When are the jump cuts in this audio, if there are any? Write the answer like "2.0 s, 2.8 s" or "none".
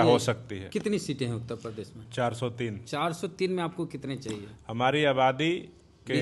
none